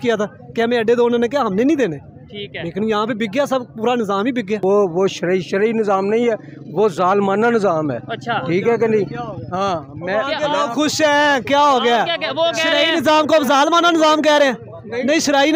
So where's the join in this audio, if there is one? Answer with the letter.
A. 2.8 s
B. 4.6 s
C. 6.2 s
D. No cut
B